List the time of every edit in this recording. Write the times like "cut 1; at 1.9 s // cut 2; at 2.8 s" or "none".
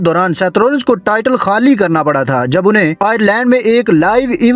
none